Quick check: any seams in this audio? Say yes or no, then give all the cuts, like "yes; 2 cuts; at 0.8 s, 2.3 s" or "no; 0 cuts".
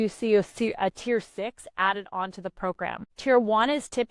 yes; 1 cut; at 3.1 s